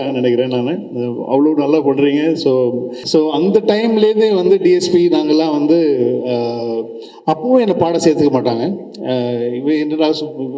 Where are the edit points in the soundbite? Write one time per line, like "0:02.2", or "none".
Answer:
0:02.9